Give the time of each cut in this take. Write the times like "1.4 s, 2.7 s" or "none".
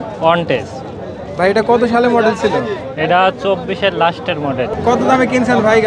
4.7 s